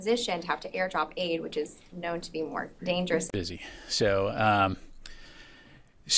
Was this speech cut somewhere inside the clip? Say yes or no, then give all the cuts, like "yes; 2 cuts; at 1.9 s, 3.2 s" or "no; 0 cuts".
no; 0 cuts